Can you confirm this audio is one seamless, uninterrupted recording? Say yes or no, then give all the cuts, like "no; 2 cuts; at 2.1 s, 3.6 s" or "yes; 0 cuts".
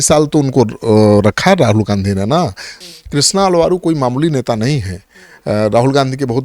no; 1 cut; at 2.7 s